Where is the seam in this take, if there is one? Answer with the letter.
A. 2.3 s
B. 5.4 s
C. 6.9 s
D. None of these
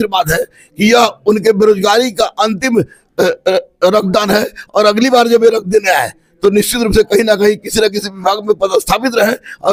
D